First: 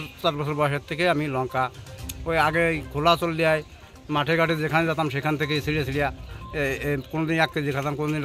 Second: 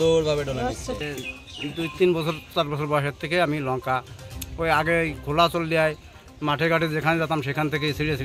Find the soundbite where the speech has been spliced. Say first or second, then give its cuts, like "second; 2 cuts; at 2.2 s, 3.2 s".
second; 1 cut; at 1.0 s